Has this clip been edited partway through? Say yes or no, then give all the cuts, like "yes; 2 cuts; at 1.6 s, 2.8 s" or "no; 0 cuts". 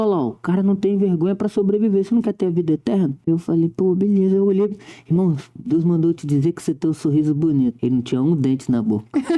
yes; 2 cuts; at 3.2 s, 7.8 s